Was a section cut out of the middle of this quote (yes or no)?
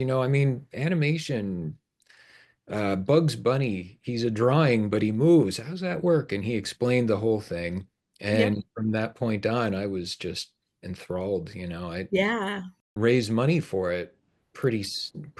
yes